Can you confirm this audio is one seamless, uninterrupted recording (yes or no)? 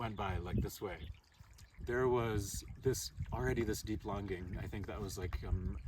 no